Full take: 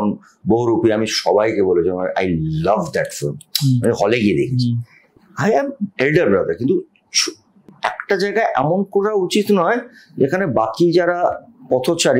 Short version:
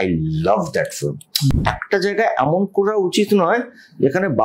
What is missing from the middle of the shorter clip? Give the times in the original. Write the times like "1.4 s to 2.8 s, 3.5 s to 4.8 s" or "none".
3.7 s to 7.7 s